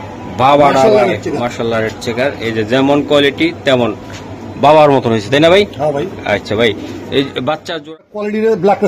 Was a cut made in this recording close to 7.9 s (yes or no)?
yes